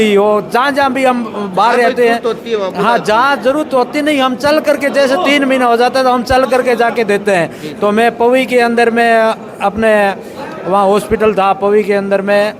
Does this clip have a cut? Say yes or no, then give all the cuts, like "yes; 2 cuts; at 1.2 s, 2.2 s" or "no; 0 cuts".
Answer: no; 0 cuts